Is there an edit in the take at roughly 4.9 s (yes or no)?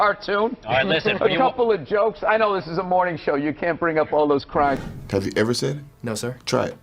yes